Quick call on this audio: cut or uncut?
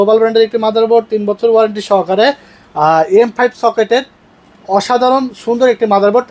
uncut